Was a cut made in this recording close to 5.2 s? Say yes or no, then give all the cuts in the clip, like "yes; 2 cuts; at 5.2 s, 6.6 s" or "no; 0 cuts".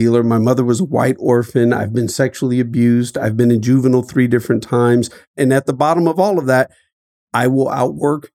yes; 1 cut; at 5.2 s